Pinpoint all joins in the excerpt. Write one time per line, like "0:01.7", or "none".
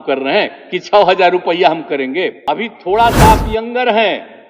0:02.4